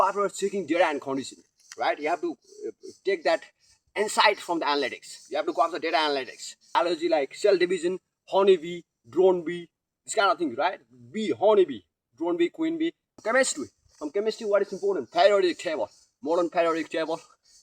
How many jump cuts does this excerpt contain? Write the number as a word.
two